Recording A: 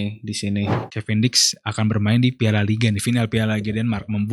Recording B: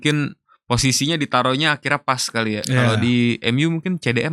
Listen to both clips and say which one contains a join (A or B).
A